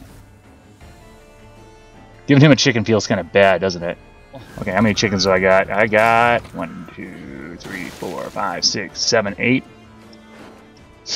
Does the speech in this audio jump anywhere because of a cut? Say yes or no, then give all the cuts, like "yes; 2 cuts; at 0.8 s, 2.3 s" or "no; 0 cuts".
yes; 1 cut; at 4.5 s